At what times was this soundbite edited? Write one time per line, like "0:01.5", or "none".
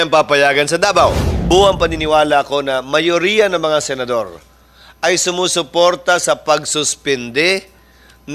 0:01.3